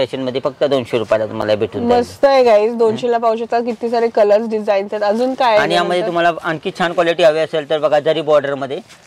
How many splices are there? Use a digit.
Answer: 0